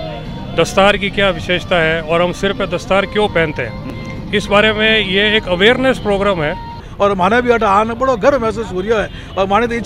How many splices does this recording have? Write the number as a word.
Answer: one